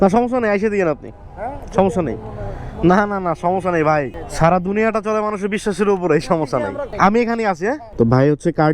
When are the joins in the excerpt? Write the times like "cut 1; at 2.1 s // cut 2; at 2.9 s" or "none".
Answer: none